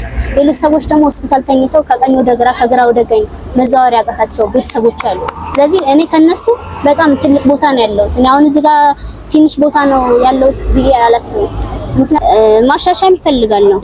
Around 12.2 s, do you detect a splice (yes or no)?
yes